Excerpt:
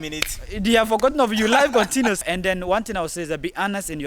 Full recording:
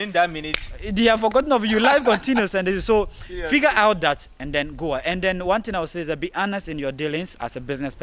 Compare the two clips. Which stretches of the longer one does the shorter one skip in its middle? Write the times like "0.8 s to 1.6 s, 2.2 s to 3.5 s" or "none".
2.5 s to 5.0 s

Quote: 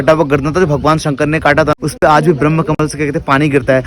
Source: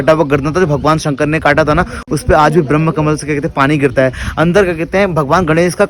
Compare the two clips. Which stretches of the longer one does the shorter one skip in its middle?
1.7 s to 2.0 s

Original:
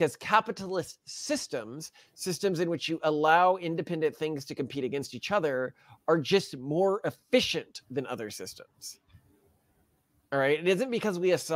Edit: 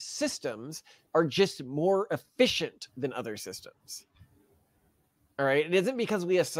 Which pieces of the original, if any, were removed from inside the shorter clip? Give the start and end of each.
2.0 s to 5.9 s

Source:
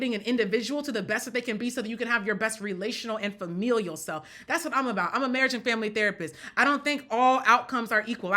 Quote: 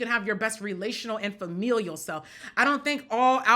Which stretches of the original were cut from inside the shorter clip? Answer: 4.3 s to 6.3 s

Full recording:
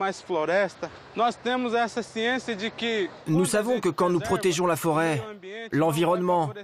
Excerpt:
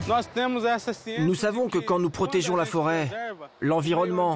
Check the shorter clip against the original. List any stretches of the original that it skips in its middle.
2.2 s to 3.2 s

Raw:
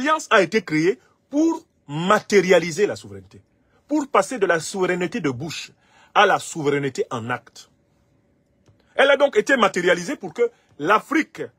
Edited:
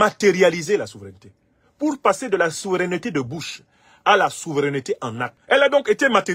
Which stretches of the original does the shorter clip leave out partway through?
7.4 s to 8.8 s

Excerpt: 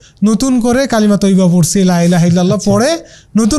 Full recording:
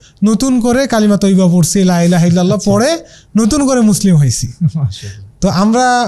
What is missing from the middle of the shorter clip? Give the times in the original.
none

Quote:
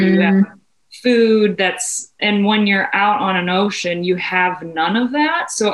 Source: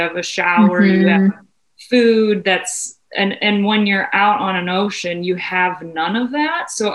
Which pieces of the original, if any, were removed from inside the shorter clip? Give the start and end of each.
3.0 s to 3.4 s

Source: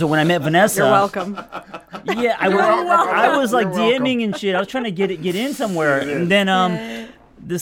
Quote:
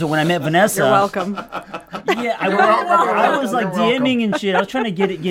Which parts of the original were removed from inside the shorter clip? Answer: none

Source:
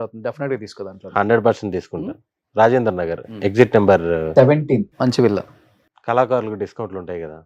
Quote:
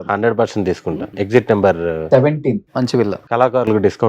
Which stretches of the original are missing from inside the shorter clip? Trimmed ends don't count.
2.1 s to 3.3 s, 5.4 s to 6.0 s

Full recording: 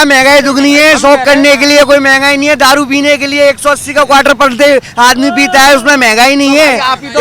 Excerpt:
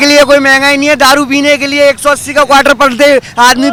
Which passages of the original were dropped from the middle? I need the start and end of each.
none

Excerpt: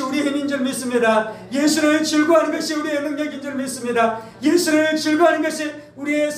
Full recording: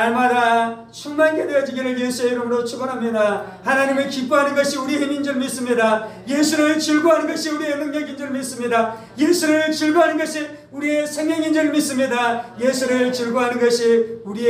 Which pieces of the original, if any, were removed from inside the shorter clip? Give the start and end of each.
none

